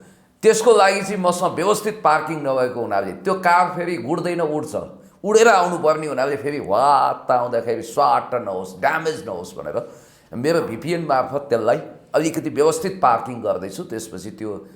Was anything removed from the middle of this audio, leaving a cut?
no; 0 cuts

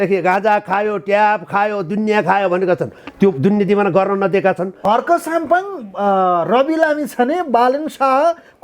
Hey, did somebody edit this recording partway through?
yes; 1 cut; at 4.8 s

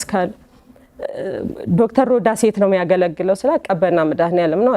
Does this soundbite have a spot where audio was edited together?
no; 0 cuts

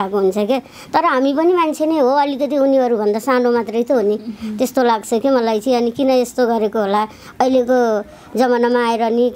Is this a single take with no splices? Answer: yes; 0 cuts

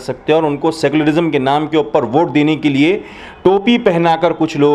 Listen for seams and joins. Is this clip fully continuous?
yes; 0 cuts

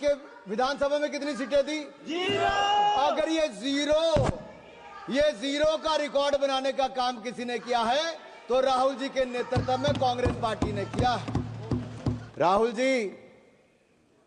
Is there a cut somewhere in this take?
yes; 1 cut; at 12.2 s

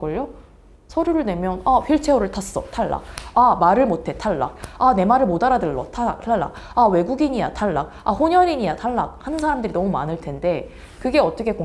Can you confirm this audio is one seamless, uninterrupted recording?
yes; 0 cuts

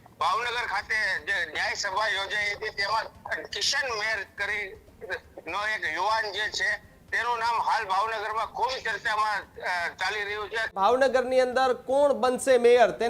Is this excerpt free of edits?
no; 1 cut; at 10.7 s

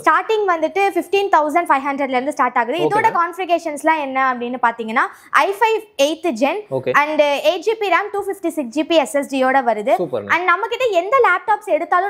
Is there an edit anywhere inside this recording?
no; 0 cuts

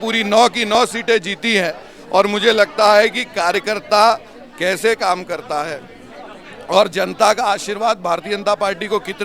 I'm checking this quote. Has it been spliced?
no; 0 cuts

